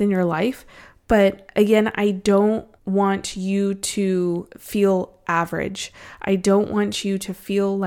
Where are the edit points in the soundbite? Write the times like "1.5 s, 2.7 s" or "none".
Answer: 2.7 s, 4.5 s